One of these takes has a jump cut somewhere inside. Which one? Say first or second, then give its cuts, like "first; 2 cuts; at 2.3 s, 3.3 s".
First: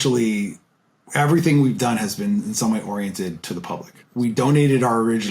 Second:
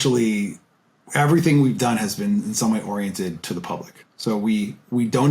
first; 1 cut; at 4.0 s